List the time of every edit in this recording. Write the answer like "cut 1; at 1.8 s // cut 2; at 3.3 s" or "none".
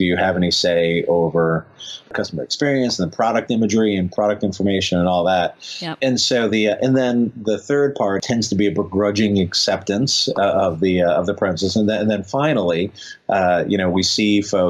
cut 1; at 2.1 s // cut 2; at 5.9 s // cut 3; at 8.2 s